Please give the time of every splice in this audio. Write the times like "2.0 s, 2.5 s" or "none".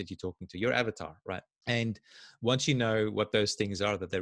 1.5 s